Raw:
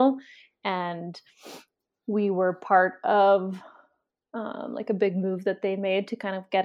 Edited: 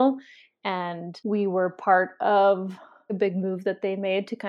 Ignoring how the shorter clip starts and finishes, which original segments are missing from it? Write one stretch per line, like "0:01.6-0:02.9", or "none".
0:01.1-0:01.9
0:03.9-0:04.9